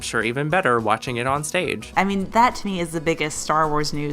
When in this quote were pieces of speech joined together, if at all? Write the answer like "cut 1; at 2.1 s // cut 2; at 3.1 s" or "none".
cut 1; at 1.9 s